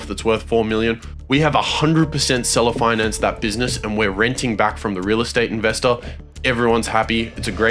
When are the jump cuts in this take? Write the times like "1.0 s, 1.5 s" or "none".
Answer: none